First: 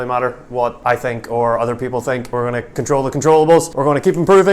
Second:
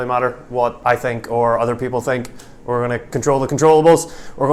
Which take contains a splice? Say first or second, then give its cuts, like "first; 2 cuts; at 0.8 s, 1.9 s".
first; 2 cuts; at 2.3 s, 3.7 s